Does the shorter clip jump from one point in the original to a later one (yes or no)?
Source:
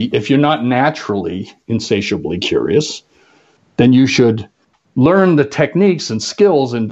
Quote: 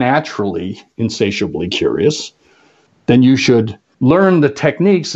yes